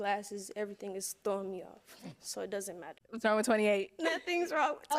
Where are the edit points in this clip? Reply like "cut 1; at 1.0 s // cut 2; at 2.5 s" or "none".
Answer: cut 1; at 3.0 s

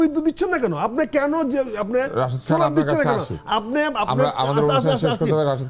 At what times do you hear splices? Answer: none

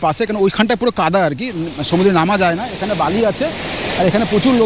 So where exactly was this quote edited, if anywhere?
none

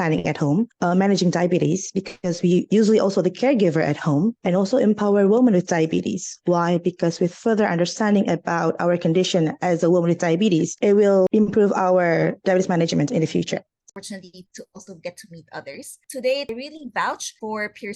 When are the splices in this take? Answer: cut 1; at 13.8 s

